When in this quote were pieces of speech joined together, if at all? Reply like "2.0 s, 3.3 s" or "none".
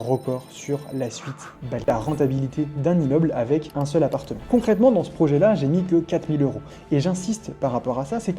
1.9 s, 4.4 s